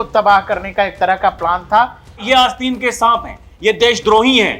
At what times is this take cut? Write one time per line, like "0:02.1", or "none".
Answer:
0:02.2